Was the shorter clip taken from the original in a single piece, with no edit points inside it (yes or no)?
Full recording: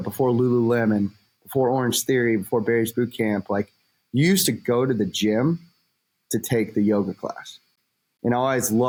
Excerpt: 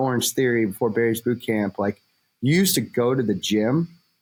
yes